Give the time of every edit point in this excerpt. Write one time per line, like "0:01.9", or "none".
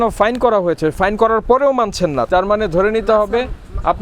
0:00.9
0:02.3